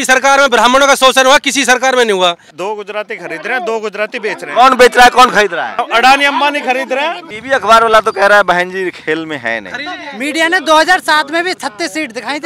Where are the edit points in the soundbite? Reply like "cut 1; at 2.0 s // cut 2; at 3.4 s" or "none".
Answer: cut 1; at 2.5 s // cut 2; at 5.8 s // cut 3; at 7.3 s // cut 4; at 10.1 s